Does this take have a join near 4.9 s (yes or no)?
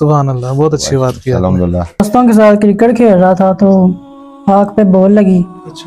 no